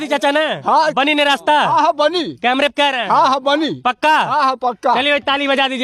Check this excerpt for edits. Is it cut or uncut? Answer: uncut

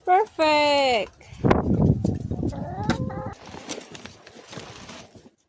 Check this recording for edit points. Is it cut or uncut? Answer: cut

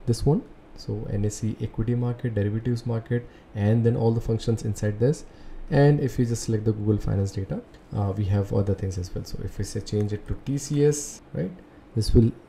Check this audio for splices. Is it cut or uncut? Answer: cut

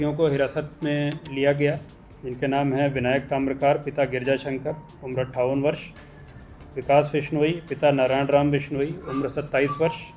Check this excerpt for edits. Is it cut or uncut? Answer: uncut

